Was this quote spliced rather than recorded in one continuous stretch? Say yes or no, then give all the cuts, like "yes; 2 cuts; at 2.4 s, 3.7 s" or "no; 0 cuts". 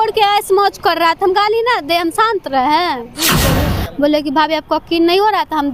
yes; 1 cut; at 3.5 s